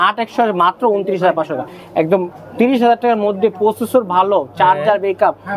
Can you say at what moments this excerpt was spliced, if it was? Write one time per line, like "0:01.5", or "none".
none